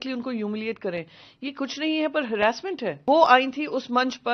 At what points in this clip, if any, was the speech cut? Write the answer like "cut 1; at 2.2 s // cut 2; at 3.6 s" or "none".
cut 1; at 3.0 s